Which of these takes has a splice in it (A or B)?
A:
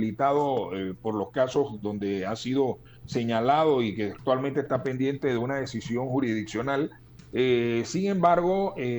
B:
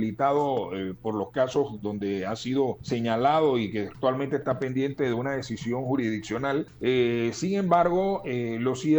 B